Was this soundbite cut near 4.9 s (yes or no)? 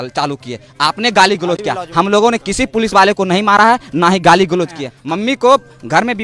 yes